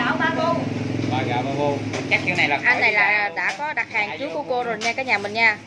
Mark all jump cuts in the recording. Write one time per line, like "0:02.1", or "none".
none